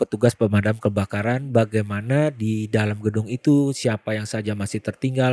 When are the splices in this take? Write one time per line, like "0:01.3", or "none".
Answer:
none

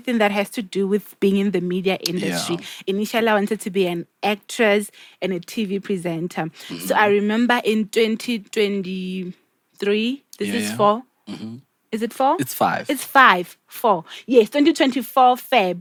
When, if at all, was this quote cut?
none

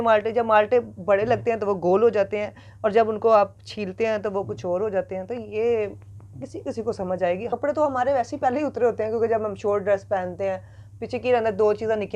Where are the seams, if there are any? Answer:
0:07.5

